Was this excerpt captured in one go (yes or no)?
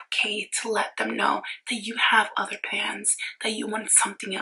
yes